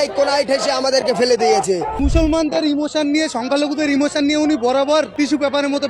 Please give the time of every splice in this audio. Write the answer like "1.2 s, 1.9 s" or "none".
1.9 s, 5.1 s